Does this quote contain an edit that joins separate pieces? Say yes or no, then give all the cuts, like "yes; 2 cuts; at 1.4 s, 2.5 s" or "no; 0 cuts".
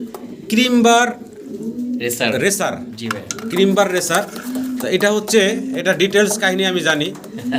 no; 0 cuts